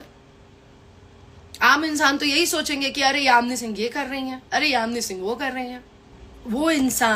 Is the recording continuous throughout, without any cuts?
yes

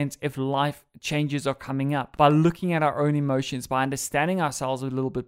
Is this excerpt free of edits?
no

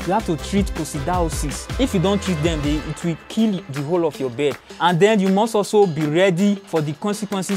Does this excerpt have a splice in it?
yes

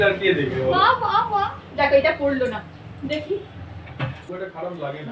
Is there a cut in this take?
yes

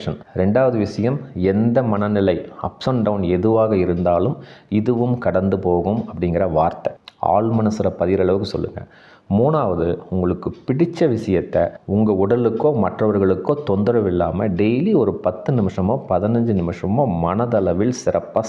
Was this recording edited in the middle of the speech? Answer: no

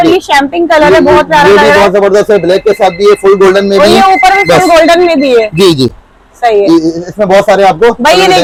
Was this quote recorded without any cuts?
yes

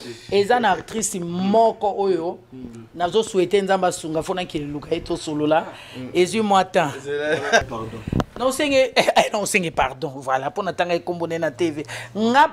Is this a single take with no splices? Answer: no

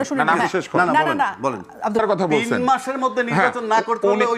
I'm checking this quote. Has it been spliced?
yes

